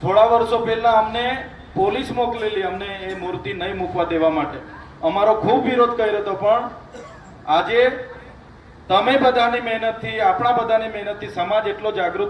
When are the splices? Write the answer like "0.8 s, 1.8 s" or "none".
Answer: none